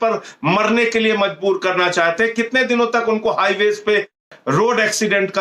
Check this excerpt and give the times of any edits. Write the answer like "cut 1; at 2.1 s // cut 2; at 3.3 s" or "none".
cut 1; at 4.3 s